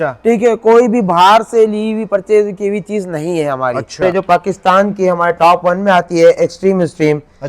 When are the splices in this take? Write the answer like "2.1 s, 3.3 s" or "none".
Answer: 4.0 s